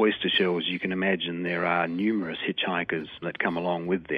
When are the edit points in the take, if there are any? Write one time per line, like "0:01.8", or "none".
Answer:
0:03.2